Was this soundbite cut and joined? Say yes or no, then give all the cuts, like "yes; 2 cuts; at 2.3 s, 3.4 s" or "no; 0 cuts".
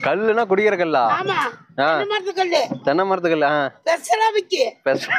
no; 0 cuts